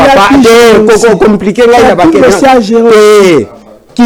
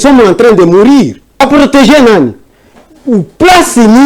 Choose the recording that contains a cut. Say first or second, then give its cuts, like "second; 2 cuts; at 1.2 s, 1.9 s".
second; 1 cut; at 1.4 s